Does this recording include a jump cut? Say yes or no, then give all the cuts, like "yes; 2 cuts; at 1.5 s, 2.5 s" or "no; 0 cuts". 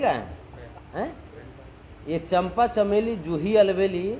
no; 0 cuts